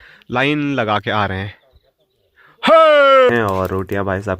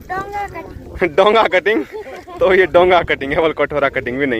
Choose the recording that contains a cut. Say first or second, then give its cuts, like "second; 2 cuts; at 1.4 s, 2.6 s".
first; 1 cut; at 3.3 s